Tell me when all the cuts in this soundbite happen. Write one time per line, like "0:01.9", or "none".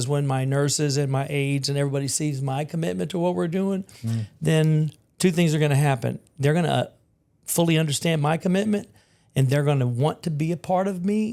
none

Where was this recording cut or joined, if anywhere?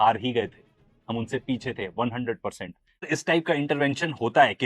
0:03.0

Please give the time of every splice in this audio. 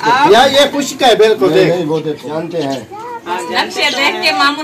0:02.2

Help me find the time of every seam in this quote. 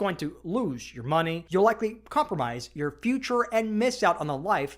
0:01.4

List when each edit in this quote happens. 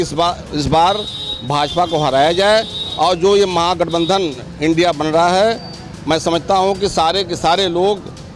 none

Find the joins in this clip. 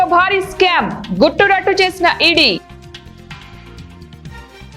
0:02.6

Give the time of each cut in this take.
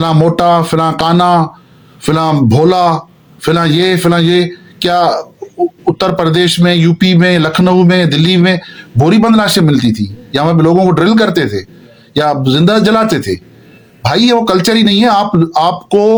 none

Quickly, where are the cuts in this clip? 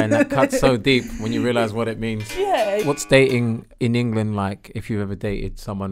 0:02.8
0:03.7

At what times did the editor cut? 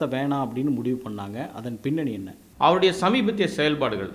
0:02.4

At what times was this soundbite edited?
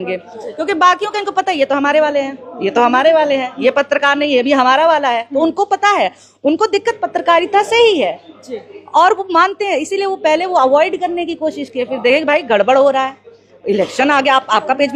none

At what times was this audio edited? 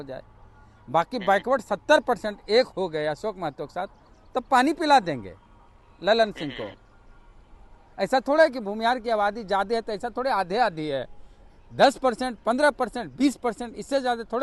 none

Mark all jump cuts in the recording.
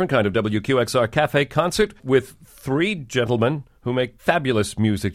0:02.0
0:04.1

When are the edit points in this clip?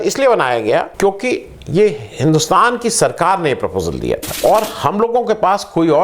0:00.9
0:04.3

